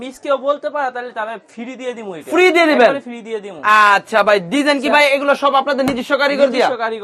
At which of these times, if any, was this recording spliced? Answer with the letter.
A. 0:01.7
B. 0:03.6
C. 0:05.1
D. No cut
D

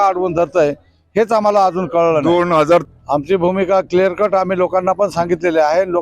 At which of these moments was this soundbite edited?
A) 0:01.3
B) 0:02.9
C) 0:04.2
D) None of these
B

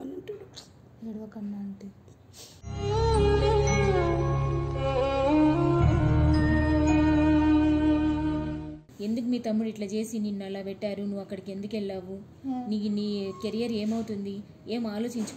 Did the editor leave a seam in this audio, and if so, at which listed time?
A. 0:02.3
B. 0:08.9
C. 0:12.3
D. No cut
B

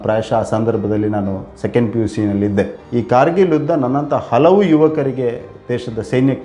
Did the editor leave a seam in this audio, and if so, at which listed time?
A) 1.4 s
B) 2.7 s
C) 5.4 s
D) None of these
D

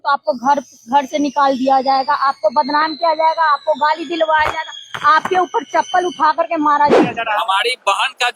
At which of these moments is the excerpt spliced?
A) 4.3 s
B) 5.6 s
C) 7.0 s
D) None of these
C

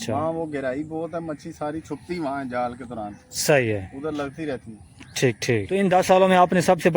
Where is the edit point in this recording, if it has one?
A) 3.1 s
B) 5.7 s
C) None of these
B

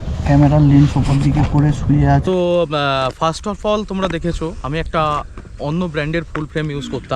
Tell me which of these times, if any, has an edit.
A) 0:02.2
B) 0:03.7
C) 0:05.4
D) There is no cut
A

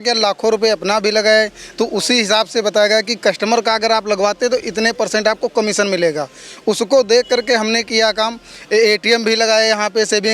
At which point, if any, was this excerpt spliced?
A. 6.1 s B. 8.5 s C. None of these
C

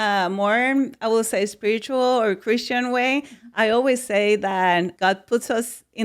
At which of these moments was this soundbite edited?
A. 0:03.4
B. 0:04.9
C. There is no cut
B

